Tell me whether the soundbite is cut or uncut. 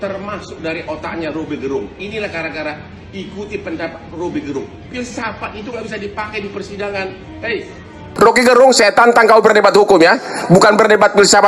cut